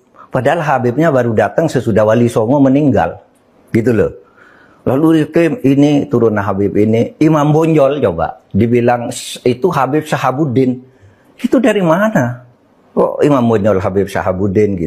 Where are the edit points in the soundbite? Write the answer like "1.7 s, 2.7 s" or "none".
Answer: none